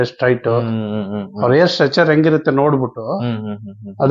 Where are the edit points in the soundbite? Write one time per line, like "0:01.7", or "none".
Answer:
none